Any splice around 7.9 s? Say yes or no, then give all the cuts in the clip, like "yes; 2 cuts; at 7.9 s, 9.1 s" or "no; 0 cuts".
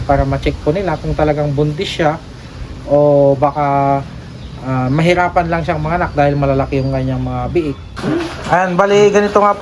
yes; 1 cut; at 7.9 s